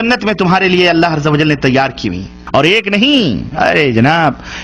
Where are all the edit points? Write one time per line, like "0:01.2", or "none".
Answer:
0:02.3